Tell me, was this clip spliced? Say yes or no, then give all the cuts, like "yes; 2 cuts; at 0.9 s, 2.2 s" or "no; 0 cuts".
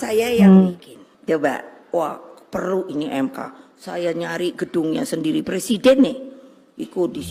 no; 0 cuts